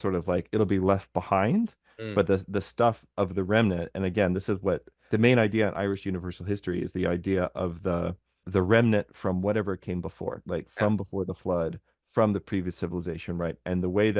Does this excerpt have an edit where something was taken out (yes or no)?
yes